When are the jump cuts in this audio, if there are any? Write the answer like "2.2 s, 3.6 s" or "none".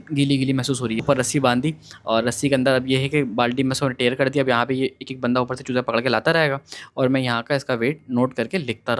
1.0 s

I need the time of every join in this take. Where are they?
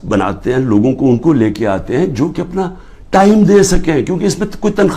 none

